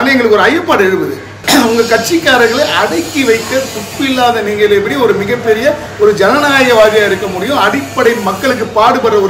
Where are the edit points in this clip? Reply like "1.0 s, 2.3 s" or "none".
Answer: 1.3 s